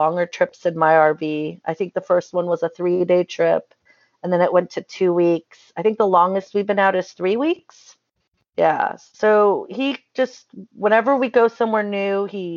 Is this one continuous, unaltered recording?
yes; 0 cuts

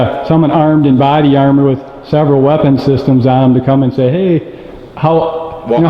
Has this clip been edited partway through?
no; 0 cuts

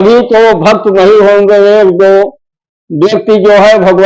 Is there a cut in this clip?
no; 0 cuts

